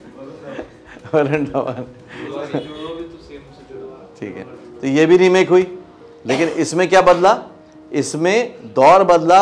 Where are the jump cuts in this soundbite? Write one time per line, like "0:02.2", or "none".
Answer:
none